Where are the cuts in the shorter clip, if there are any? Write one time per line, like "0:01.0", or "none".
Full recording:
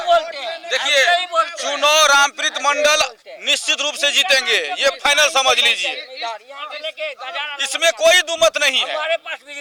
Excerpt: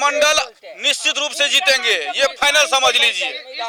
none